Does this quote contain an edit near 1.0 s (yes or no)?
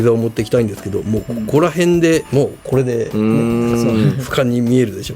yes